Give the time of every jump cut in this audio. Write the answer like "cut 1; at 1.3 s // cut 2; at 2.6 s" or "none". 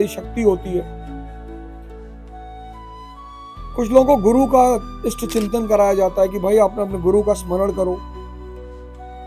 cut 1; at 8.0 s